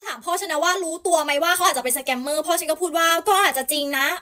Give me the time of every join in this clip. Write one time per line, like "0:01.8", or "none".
none